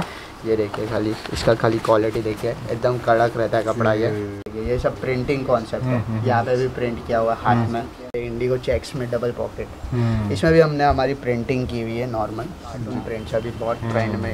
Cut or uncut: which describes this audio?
cut